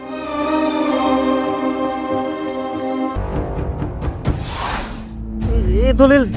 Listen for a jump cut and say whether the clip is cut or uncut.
cut